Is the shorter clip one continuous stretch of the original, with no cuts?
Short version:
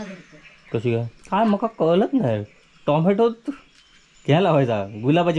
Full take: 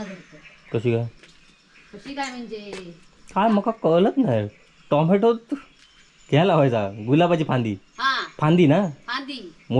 no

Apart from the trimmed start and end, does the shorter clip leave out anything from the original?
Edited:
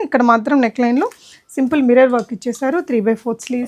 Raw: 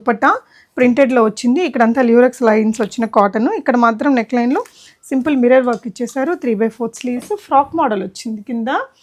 no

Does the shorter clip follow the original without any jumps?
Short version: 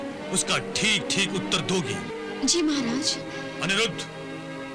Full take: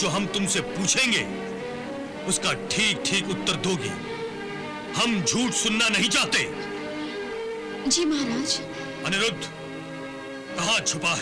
no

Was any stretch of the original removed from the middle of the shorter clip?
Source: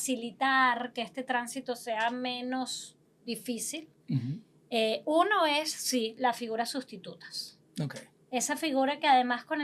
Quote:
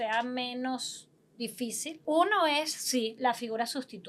yes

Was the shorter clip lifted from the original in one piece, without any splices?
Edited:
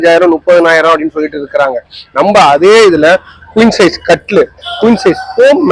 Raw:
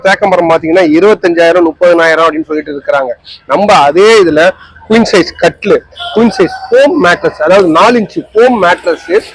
yes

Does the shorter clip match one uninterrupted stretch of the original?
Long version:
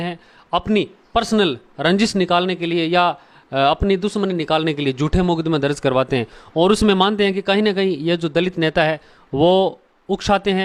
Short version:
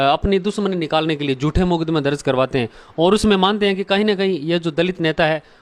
yes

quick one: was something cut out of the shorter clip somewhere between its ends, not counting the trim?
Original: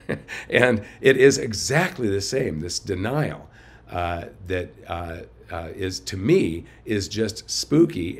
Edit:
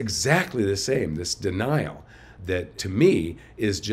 yes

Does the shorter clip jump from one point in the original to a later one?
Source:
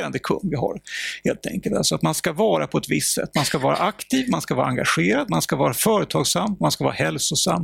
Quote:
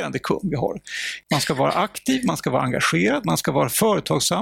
yes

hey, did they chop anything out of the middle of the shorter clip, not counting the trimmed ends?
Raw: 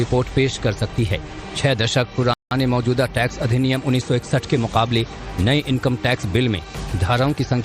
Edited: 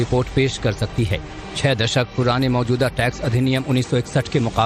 yes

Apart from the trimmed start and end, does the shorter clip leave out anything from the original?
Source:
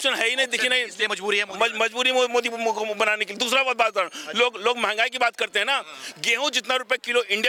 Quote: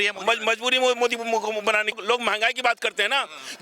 yes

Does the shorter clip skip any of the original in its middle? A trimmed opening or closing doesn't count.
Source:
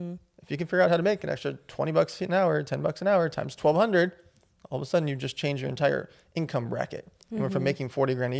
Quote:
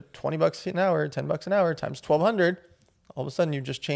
no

